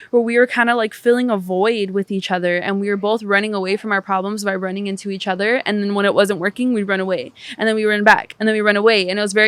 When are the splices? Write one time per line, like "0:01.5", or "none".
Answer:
none